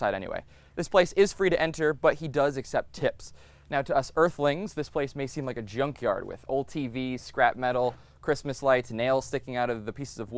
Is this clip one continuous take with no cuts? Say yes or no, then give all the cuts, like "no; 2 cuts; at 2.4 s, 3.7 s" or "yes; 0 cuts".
yes; 0 cuts